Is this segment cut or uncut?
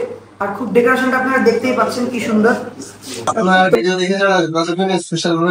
cut